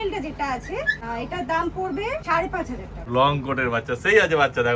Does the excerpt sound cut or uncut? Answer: cut